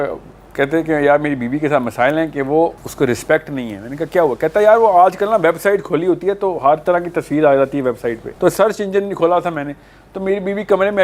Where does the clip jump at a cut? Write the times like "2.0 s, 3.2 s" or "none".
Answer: 2.8 s, 8.3 s